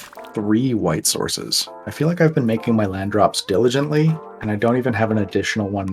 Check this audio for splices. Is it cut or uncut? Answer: cut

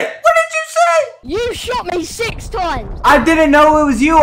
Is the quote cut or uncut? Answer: cut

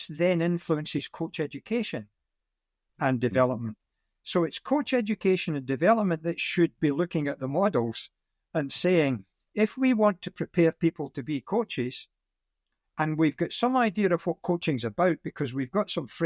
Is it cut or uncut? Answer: uncut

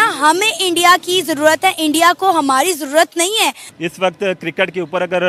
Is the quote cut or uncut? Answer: uncut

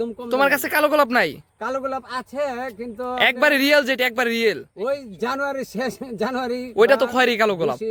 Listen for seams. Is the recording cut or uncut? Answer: uncut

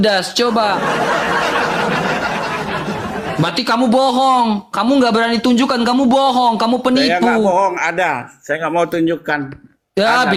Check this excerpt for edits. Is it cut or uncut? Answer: uncut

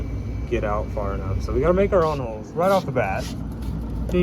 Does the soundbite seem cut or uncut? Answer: cut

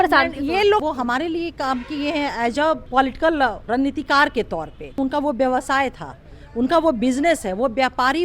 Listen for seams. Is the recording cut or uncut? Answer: cut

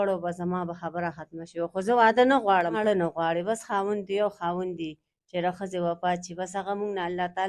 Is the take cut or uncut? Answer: cut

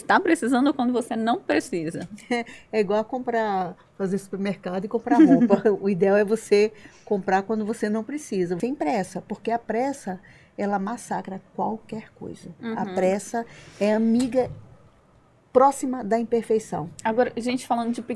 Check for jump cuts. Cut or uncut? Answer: uncut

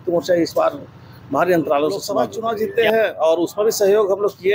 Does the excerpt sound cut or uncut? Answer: cut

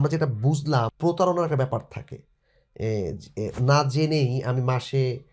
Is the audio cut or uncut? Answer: cut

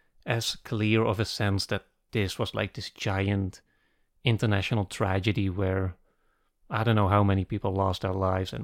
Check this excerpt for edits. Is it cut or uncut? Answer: uncut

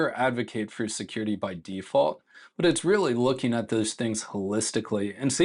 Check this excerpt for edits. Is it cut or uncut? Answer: uncut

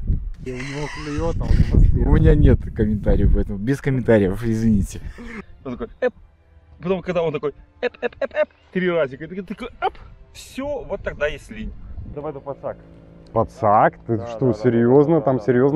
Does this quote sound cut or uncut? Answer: cut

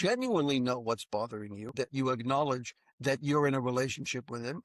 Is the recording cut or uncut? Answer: cut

